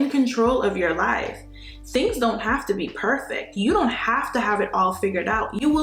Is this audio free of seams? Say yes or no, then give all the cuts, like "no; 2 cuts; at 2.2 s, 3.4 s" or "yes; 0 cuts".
yes; 0 cuts